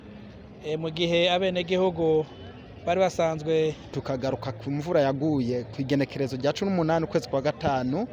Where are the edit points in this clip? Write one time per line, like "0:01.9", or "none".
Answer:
0:03.9